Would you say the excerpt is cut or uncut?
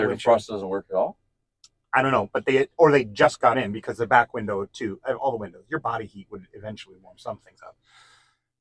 uncut